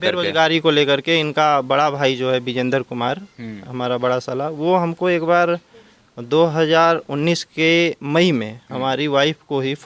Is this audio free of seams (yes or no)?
yes